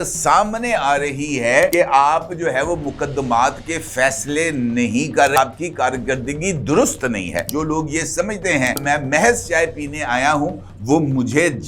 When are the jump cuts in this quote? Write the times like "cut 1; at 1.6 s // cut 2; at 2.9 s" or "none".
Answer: cut 1; at 1.7 s // cut 2; at 5.4 s // cut 3; at 7.5 s // cut 4; at 8.8 s